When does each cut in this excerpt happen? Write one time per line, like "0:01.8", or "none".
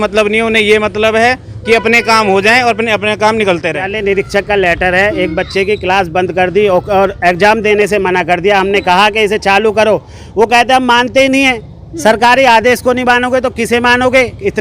0:03.9